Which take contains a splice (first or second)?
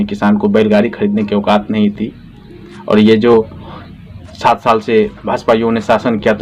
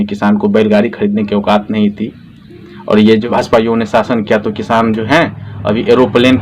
second